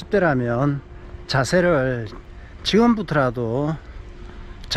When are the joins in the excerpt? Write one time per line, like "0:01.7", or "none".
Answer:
none